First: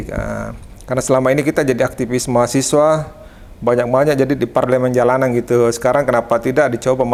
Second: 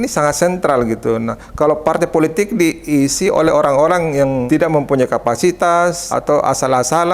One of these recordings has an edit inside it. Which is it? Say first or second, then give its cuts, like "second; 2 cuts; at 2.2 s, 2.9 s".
second; 2 cuts; at 4.4 s, 6.1 s